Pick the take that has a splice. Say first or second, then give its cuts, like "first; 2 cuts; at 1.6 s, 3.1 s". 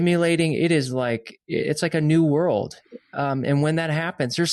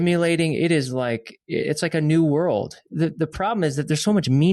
second; 1 cut; at 2.9 s